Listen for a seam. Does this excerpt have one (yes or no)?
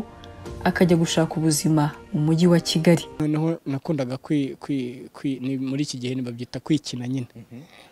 no